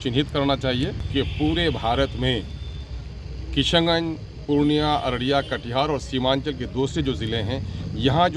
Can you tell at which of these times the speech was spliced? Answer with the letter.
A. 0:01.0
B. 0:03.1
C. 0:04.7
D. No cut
A